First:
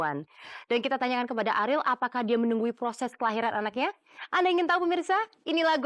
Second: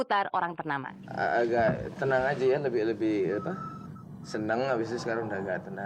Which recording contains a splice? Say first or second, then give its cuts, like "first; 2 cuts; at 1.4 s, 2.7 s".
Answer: second; 1 cut; at 1.0 s